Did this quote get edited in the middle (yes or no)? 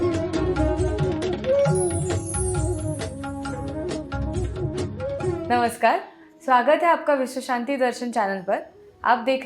no